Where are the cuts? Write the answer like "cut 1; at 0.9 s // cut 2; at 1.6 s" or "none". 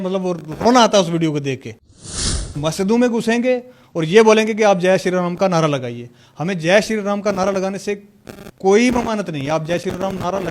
cut 1; at 2.0 s

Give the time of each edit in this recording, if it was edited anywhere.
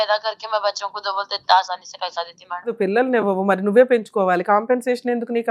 cut 1; at 2.7 s

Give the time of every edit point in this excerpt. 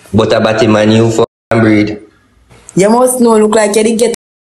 none

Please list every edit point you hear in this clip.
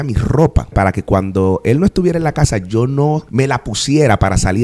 cut 1; at 0.7 s // cut 2; at 3.3 s

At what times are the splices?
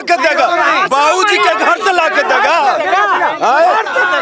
none

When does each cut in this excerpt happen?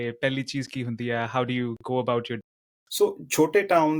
cut 1; at 2.4 s

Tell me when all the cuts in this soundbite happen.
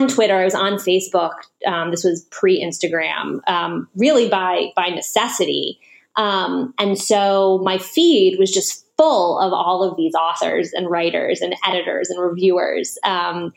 none

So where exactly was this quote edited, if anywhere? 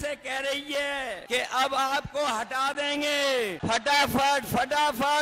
cut 1; at 1.2 s // cut 2; at 3.6 s

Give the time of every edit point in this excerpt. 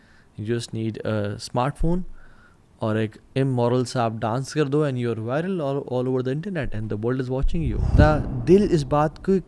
cut 1; at 7.9 s

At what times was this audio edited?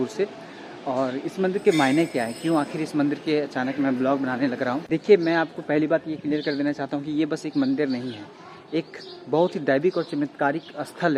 none

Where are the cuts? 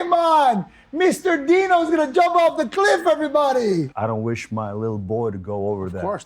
cut 1; at 3.9 s

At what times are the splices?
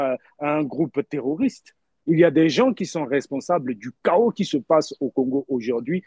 cut 1; at 1.9 s

